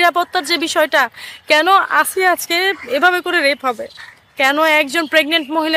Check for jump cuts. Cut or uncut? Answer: uncut